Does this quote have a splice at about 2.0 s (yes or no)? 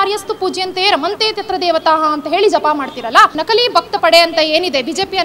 no